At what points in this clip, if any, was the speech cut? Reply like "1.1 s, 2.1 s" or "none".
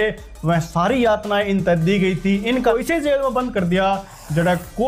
2.7 s